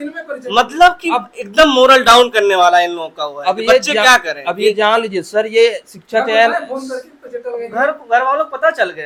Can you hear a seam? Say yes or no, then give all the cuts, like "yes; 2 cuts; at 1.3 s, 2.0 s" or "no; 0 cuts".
no; 0 cuts